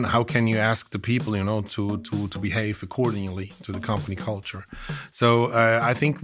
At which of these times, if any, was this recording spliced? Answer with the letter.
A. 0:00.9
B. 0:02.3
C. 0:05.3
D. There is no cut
D